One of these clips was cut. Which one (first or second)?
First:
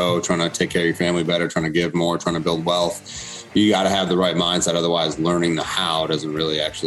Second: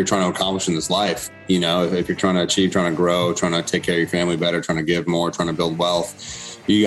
second